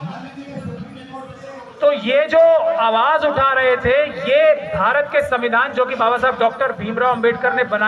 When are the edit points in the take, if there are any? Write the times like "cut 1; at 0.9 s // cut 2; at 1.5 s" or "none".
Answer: none